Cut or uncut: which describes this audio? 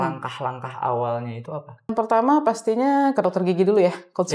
cut